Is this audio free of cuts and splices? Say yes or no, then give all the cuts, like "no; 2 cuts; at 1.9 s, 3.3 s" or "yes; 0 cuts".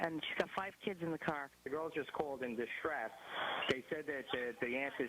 no; 1 cut; at 1.7 s